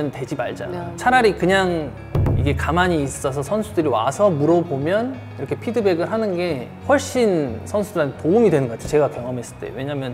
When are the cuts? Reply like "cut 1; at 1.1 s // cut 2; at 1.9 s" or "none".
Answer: none